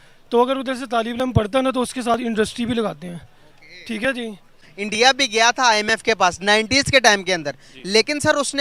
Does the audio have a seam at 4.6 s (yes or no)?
yes